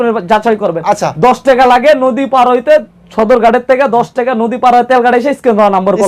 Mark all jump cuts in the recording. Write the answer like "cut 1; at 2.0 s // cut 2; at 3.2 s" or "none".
none